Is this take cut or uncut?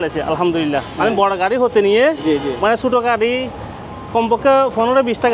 uncut